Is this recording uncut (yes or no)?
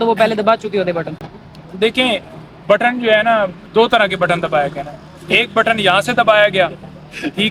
yes